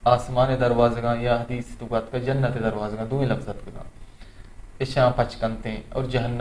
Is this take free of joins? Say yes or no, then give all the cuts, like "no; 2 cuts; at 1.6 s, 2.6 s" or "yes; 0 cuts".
yes; 0 cuts